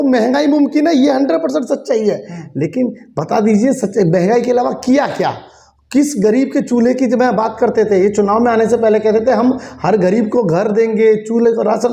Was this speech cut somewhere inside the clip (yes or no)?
no